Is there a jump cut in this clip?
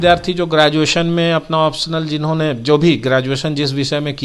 no; 0 cuts

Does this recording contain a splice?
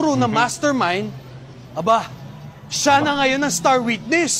no; 0 cuts

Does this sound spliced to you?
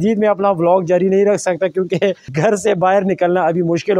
no; 0 cuts

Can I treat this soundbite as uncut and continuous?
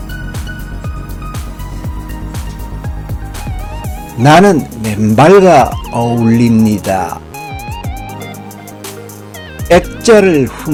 yes; 0 cuts

